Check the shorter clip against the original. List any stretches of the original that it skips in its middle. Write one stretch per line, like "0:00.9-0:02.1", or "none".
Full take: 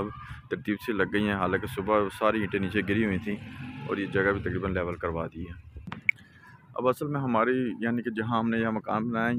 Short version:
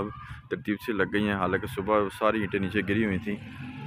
none